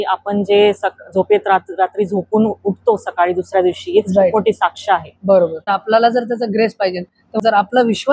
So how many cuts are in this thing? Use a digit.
2